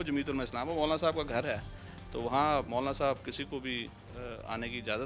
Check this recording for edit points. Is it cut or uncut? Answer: uncut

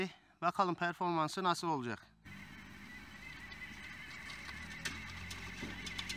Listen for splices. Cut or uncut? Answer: cut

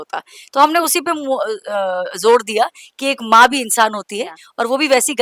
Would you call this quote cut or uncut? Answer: uncut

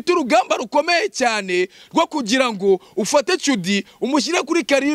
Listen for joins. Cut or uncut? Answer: uncut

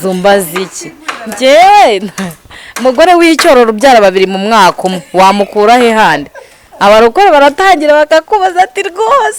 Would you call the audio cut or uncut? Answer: uncut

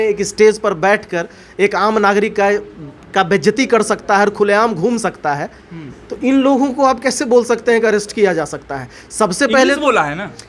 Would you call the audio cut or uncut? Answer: uncut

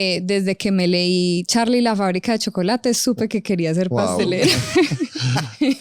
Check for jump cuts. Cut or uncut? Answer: uncut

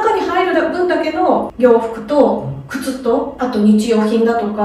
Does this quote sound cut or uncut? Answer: uncut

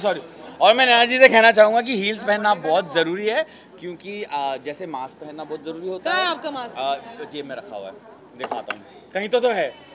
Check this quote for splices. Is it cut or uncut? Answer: uncut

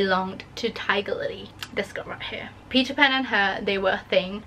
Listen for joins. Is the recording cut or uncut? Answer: uncut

